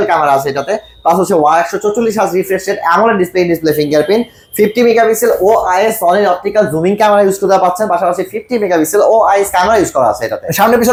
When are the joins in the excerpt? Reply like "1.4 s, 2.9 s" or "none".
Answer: none